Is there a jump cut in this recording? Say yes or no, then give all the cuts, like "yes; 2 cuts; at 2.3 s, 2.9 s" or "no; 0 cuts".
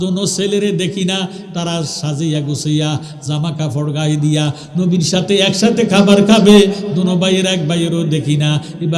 no; 0 cuts